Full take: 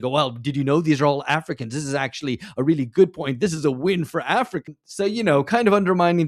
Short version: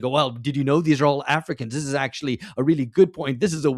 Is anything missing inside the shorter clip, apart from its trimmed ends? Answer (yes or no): no